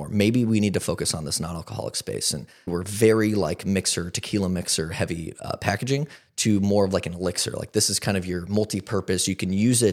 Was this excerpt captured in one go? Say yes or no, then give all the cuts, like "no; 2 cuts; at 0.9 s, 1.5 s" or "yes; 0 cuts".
no; 1 cut; at 2.7 s